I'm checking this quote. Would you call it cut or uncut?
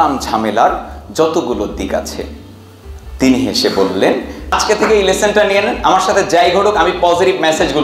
cut